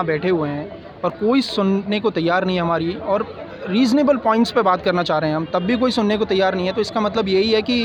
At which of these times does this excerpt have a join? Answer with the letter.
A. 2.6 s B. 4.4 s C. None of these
C